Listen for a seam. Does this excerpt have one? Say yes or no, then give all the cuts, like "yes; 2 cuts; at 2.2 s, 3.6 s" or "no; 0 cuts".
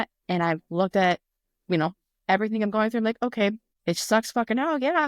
yes; 1 cut; at 3.7 s